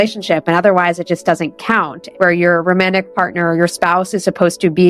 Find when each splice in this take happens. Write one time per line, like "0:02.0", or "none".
0:02.0

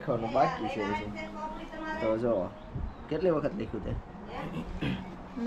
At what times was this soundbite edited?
none

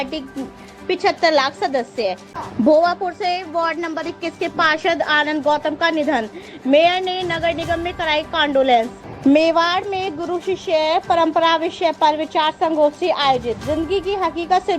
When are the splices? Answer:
0:02.3
0:09.0

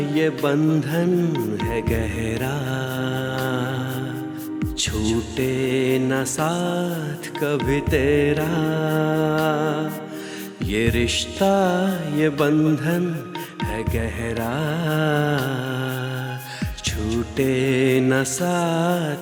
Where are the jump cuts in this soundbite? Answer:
none

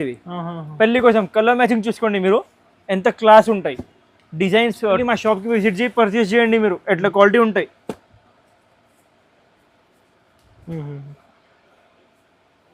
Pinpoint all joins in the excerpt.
0:05.0

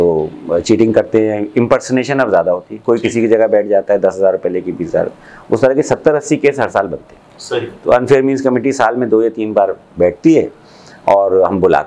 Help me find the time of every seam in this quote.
none

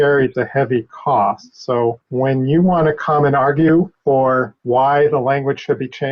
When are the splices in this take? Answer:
0:02.0
0:04.3

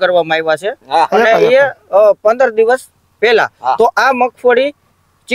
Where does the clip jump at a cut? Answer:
none

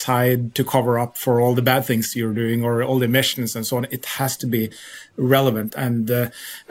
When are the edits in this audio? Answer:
0:05.8

